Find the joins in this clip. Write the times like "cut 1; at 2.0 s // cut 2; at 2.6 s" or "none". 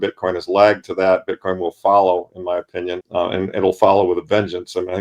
cut 1; at 3.0 s